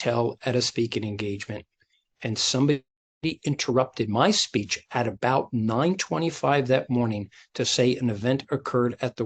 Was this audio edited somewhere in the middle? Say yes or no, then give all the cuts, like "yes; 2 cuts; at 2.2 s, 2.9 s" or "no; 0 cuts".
no; 0 cuts